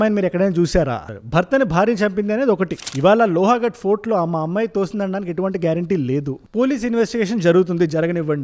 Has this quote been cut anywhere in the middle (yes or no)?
yes